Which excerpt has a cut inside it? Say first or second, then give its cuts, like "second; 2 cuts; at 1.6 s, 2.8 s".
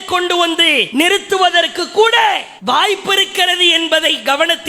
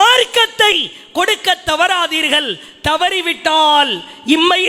first; 2 cuts; at 0.9 s, 2.5 s